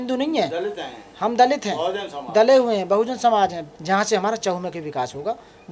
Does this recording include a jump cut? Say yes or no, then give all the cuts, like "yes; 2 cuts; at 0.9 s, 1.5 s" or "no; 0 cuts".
yes; 1 cut; at 3.7 s